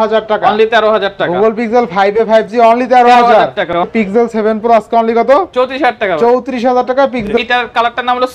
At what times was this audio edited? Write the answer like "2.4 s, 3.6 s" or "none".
3.8 s, 7.3 s